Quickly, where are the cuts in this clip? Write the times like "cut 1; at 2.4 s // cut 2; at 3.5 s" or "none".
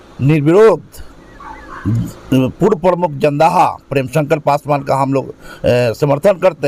none